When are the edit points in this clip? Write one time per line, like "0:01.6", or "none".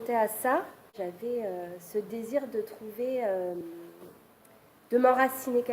0:01.0